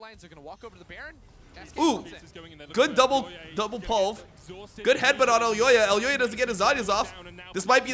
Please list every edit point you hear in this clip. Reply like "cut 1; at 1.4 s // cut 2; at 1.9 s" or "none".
none